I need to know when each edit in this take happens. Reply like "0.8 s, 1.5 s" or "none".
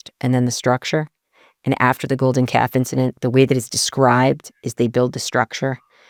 none